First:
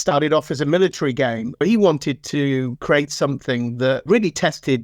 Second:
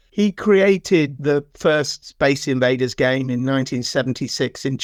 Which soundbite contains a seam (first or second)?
first